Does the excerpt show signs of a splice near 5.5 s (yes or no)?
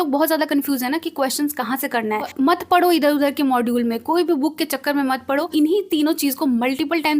yes